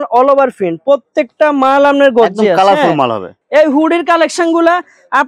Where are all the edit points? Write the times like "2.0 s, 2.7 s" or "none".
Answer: 3.3 s